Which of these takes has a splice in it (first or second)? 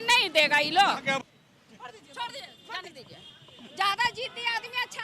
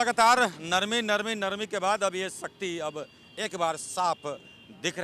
first